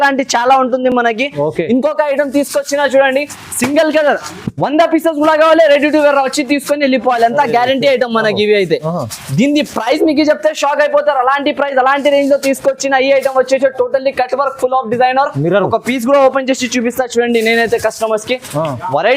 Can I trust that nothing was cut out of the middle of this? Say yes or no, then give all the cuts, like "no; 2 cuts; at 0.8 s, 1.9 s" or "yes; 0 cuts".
yes; 0 cuts